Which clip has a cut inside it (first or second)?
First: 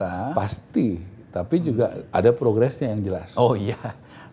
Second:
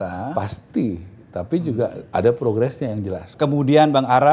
second